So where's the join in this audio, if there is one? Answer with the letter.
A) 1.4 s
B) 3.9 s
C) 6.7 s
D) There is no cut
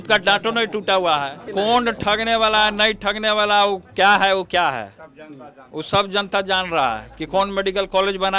A